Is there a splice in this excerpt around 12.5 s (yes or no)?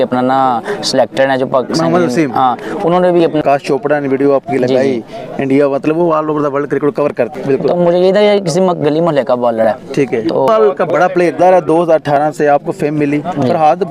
no